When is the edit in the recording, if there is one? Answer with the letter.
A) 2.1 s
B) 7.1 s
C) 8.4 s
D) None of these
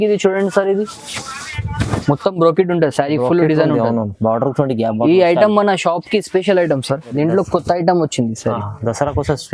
B